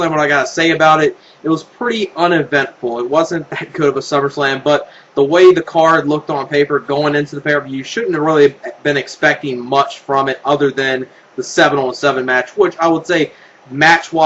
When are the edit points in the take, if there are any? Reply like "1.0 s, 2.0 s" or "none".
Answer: none